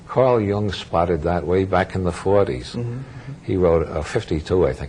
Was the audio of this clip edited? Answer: no; 0 cuts

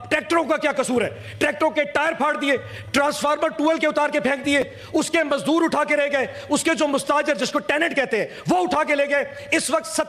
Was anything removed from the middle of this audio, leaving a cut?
no; 0 cuts

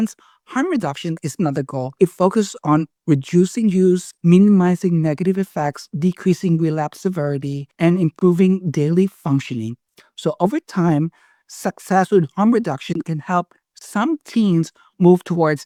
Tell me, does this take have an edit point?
no; 0 cuts

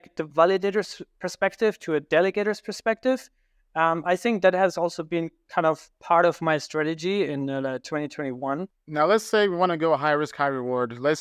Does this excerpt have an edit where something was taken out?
yes; 1 cut; at 8.8 s

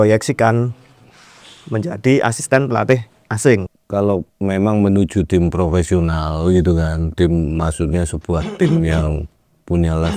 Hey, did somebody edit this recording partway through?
yes; 1 cut; at 3.8 s

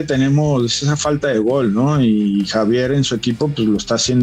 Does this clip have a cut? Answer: no; 0 cuts

